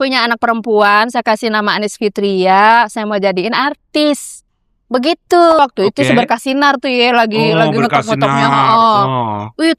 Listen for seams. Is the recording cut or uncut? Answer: cut